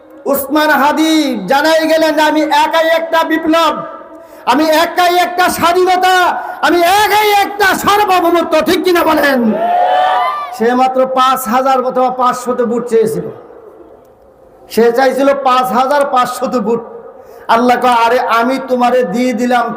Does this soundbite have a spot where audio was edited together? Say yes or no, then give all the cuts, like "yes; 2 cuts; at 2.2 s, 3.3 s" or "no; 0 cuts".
no; 0 cuts